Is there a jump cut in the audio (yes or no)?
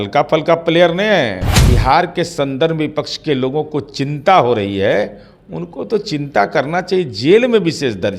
yes